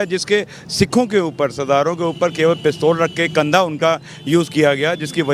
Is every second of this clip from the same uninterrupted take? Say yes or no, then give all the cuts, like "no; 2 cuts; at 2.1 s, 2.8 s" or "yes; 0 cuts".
yes; 0 cuts